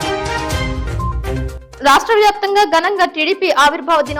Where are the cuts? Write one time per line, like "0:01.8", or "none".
0:00.9
0:01.6